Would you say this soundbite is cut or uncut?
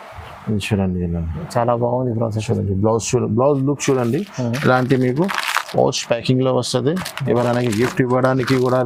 uncut